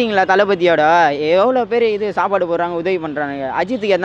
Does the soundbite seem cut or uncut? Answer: uncut